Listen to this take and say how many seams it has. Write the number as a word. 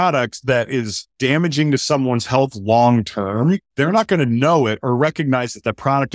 two